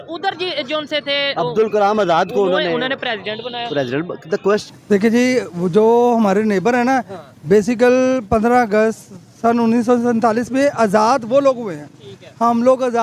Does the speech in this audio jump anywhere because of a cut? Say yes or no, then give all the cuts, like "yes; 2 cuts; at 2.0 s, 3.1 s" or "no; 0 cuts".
yes; 1 cut; at 4.6 s